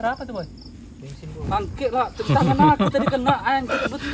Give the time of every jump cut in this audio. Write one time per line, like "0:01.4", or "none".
none